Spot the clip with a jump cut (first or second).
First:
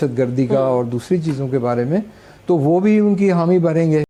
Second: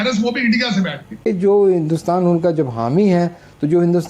second